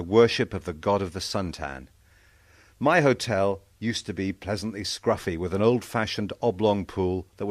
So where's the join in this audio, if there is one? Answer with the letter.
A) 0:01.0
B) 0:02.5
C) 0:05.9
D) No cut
C